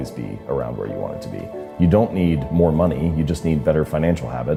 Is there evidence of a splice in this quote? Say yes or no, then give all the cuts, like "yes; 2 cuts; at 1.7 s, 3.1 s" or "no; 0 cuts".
no; 0 cuts